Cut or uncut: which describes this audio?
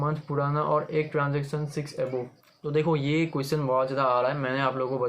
cut